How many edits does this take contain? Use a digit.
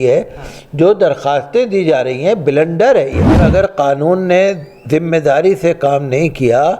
1